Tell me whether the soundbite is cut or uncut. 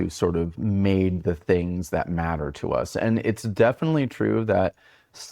uncut